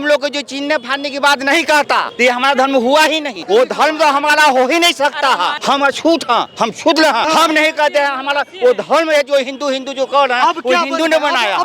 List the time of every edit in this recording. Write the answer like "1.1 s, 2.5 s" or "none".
2.1 s, 3.3 s, 5.6 s, 7.3 s